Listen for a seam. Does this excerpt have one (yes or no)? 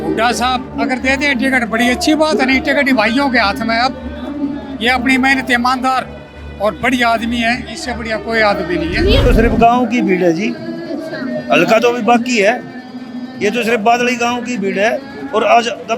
yes